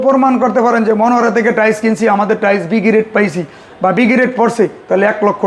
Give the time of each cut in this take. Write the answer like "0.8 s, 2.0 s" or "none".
none